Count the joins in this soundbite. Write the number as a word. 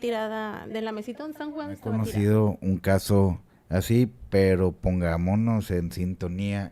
one